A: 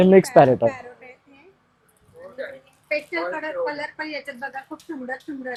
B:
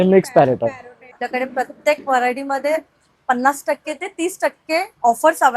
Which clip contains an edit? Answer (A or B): B